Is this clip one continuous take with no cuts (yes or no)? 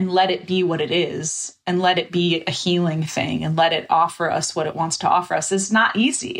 yes